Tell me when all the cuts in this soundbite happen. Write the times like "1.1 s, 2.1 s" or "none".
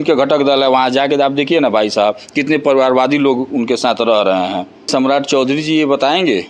4.9 s